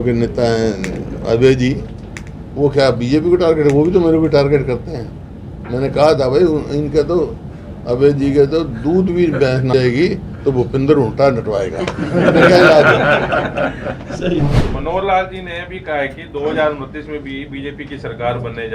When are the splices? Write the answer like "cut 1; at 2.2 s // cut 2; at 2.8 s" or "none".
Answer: cut 1; at 9.7 s // cut 2; at 14.6 s